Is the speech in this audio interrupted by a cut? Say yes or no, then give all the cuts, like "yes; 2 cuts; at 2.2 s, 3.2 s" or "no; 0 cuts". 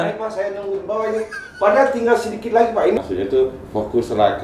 yes; 1 cut; at 3.0 s